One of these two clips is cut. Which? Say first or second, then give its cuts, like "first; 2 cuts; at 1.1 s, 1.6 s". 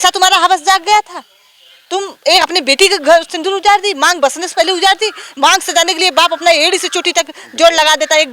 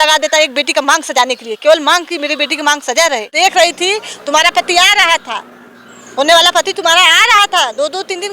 second; 1 cut; at 3.3 s